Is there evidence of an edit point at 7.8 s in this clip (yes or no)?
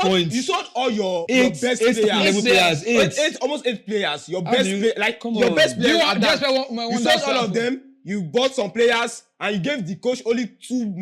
no